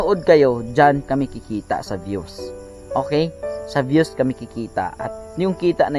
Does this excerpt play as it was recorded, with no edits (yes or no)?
yes